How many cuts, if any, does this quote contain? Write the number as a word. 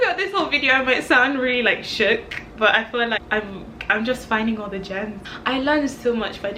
two